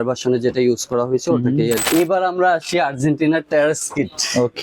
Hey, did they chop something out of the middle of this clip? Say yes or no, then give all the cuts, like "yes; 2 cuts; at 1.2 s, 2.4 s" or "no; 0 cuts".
yes; 1 cut; at 1.8 s